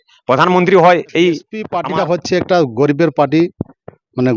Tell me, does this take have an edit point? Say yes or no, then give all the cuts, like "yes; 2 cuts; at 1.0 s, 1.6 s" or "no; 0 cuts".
yes; 1 cut; at 1.7 s